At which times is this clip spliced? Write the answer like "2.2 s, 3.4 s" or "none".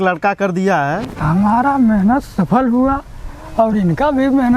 1.2 s